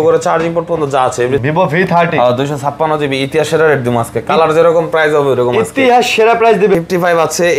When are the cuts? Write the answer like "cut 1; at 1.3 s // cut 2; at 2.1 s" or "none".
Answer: cut 1; at 1.4 s // cut 2; at 6.8 s